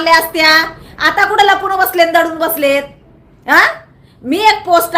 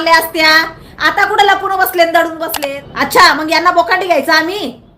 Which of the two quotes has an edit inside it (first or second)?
second